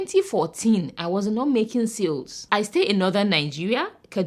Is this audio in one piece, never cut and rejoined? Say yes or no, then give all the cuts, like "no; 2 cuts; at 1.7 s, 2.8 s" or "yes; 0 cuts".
no; 1 cut; at 2.4 s